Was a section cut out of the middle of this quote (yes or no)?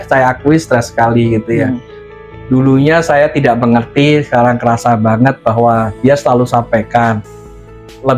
yes